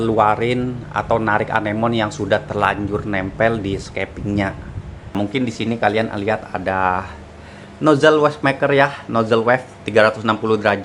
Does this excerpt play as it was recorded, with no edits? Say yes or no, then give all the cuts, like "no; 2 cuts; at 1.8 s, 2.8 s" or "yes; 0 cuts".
no; 1 cut; at 5.1 s